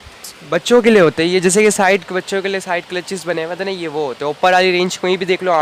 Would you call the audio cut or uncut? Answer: uncut